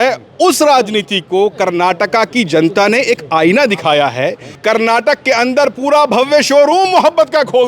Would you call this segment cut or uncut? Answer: cut